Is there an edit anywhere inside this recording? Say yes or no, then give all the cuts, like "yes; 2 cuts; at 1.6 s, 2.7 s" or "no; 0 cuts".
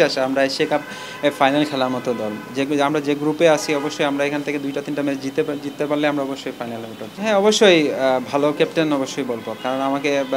no; 0 cuts